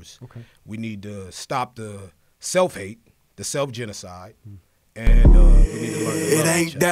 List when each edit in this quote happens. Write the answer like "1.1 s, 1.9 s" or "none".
5.1 s